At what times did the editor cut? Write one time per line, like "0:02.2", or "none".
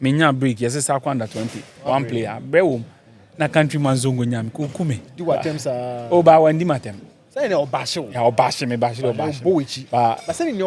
0:05.1